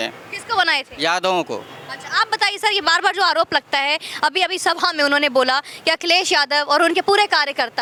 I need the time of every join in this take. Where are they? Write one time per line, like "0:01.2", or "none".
none

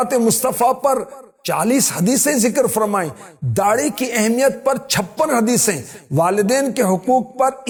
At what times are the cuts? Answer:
none

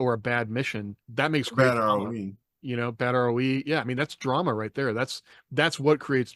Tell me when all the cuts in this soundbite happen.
0:01.0

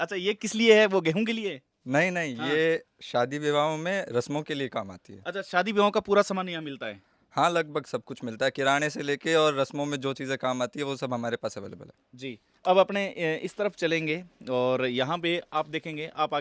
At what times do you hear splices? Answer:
none

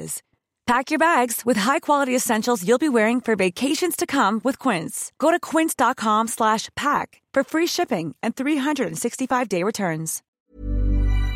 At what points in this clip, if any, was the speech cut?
0:10.4

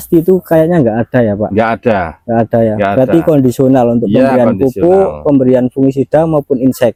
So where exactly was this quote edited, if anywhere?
none

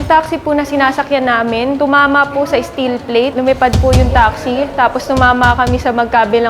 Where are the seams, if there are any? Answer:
0:01.8
0:03.3

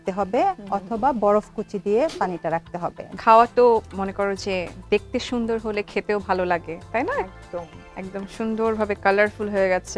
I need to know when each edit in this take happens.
0:03.1

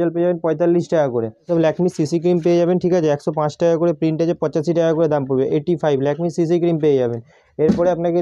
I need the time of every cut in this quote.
none

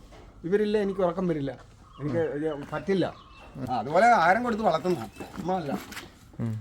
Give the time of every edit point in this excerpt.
0:03.6

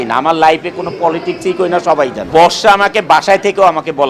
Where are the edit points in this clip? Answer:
0:02.3

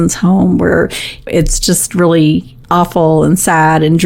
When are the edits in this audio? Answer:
0:01.3
0:02.5

